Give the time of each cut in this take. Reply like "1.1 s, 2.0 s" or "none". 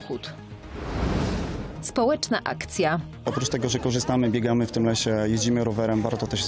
none